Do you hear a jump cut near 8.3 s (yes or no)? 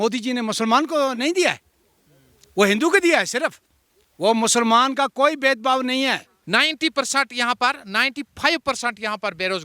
no